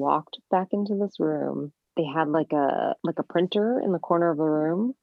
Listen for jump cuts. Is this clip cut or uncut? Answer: cut